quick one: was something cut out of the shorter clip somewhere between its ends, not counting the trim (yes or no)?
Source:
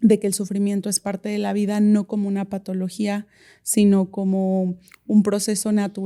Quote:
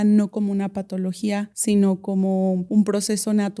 yes